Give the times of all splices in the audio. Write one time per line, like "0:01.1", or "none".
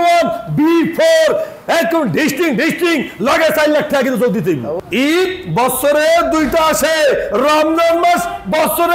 0:04.8